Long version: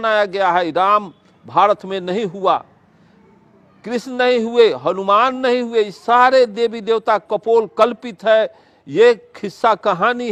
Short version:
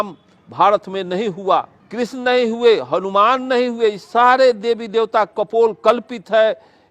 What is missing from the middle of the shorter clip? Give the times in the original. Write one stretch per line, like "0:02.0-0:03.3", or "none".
0:02.8-0:03.7